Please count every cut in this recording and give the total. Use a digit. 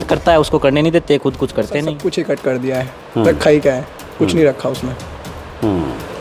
1